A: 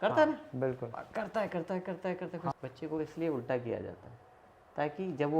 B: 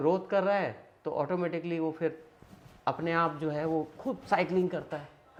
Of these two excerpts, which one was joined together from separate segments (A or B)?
A